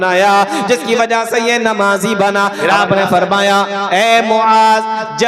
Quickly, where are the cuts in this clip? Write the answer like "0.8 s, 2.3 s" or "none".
2.6 s